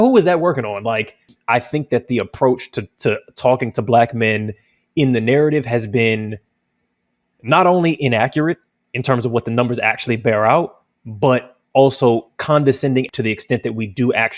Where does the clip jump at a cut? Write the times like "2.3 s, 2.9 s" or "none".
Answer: 1.3 s, 13.1 s

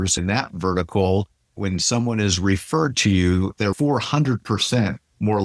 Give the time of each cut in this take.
1.5 s, 3.6 s

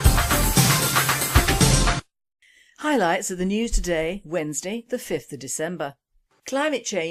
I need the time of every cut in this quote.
none

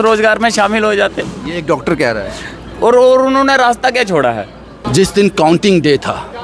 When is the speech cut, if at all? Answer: 4.8 s

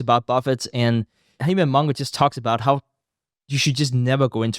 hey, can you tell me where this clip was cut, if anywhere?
1.4 s

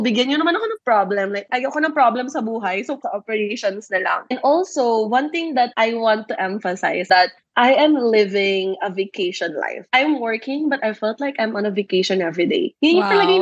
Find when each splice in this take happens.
7.0 s

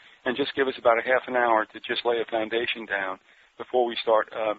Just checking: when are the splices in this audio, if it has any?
none

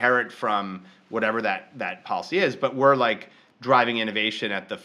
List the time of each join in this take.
none

